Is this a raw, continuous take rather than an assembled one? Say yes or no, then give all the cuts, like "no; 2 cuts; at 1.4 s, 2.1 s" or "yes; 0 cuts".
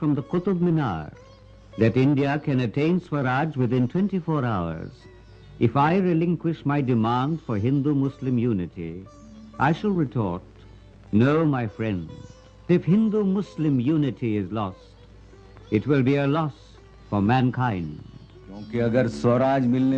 yes; 0 cuts